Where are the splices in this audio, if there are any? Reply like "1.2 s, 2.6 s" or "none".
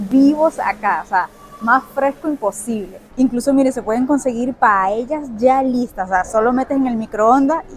3.0 s, 4.5 s